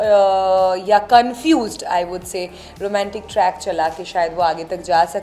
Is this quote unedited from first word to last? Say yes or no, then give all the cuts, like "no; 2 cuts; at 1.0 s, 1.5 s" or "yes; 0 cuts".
yes; 0 cuts